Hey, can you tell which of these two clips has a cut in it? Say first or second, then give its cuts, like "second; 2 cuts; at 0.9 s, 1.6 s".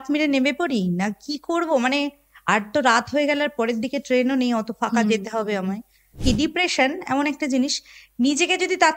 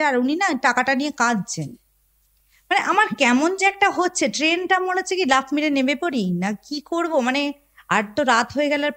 first; 1 cut; at 6.2 s